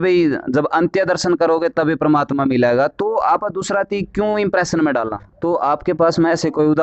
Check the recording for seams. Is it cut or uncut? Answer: cut